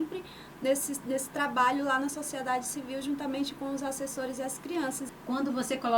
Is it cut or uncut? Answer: cut